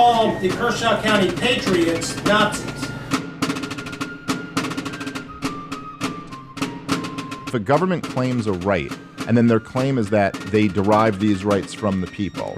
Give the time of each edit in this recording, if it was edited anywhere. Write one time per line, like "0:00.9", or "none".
0:03.0